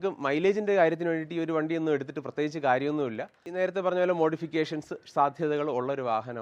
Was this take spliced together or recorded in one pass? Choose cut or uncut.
cut